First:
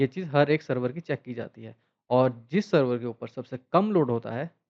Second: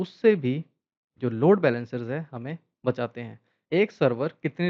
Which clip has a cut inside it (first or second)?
second